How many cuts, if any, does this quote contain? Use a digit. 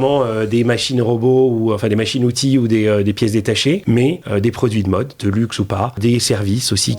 2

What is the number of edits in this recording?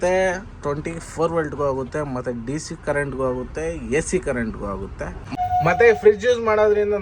1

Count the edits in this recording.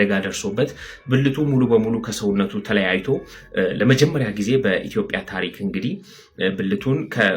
1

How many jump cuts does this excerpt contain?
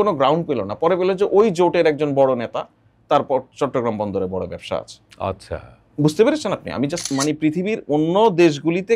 1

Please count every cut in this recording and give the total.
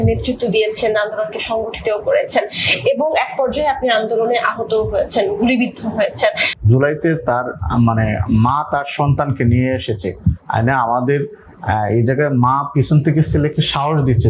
1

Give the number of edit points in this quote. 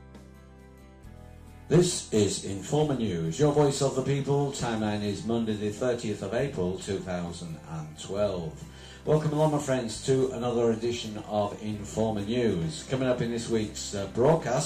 2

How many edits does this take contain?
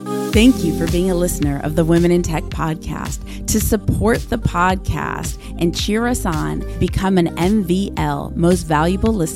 0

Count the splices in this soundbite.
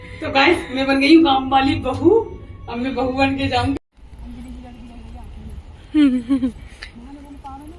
1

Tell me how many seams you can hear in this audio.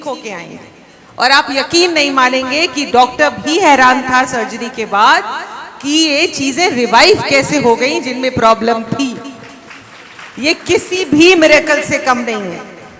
1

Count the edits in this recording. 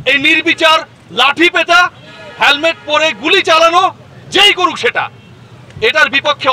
0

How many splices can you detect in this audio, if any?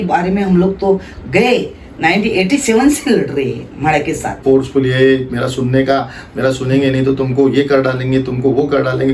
1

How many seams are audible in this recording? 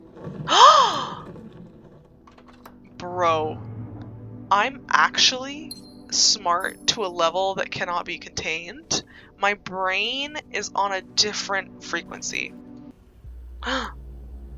1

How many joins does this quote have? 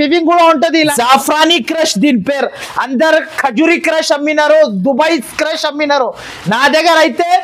1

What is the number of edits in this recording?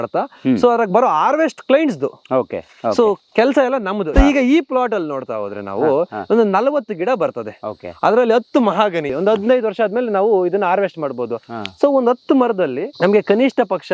3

